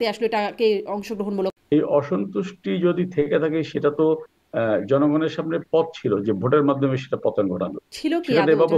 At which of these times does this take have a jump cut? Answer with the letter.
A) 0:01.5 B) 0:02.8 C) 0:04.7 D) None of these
A